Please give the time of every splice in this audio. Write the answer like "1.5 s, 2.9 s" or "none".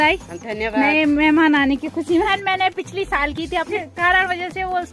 2.3 s, 3.7 s